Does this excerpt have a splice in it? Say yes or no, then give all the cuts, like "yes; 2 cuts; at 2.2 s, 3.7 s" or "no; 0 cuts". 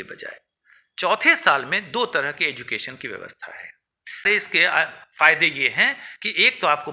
yes; 1 cut; at 4.2 s